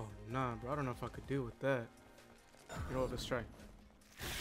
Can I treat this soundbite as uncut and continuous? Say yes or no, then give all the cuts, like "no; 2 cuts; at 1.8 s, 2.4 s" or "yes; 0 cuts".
no; 1 cut; at 3.1 s